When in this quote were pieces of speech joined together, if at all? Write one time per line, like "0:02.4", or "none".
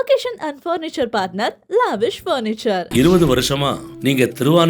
0:02.8